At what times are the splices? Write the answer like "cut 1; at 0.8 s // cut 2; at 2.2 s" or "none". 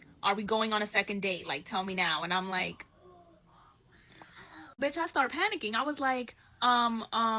cut 1; at 4.8 s